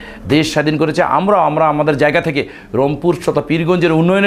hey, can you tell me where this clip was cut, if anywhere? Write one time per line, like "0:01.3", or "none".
none